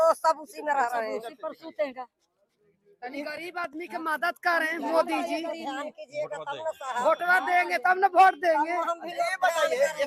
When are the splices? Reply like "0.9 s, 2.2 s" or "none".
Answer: none